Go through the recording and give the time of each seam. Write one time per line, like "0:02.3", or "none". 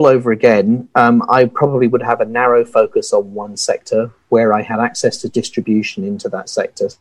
none